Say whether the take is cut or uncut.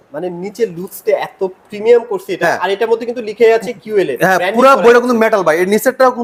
uncut